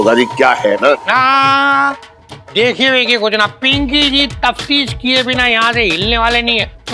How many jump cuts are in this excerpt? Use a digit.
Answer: 0